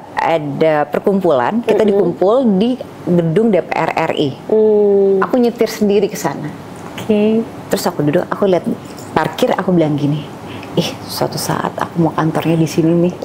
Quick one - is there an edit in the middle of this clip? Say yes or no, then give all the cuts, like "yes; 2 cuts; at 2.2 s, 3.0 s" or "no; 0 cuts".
no; 0 cuts